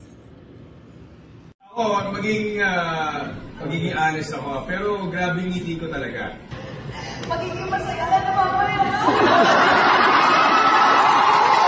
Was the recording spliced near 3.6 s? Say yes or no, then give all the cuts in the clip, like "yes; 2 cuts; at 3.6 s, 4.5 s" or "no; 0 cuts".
no; 1 cut; at 1.6 s